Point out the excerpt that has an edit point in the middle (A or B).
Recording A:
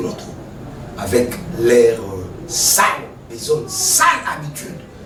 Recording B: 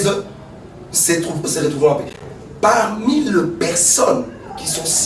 B